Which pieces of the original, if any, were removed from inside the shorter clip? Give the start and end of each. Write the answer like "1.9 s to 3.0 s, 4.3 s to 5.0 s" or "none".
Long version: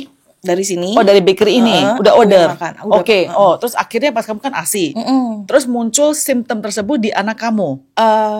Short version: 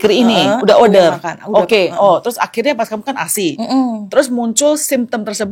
none